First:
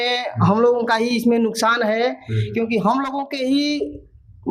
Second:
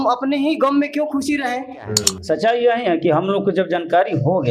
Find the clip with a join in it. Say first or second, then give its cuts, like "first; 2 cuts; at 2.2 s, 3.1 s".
second; 1 cut; at 2.1 s